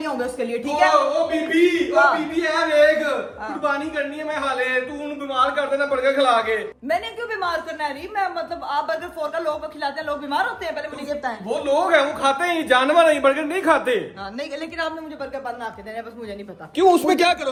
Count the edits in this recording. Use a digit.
0